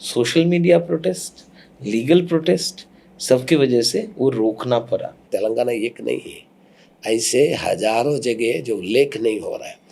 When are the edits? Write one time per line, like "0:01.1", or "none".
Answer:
0:05.2